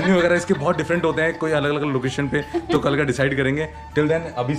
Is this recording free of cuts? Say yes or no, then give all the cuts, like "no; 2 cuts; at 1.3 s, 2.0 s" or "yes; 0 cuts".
yes; 0 cuts